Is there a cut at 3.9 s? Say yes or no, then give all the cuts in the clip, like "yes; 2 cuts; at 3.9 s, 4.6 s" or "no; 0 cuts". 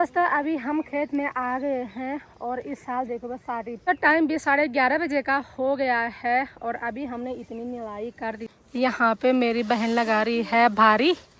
yes; 2 cuts; at 3.9 s, 8.5 s